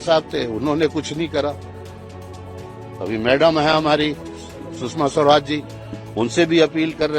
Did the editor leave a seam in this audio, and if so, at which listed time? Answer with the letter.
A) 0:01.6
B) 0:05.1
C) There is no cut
C